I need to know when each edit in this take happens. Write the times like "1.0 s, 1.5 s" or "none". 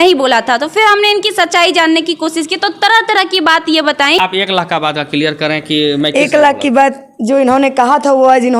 4.2 s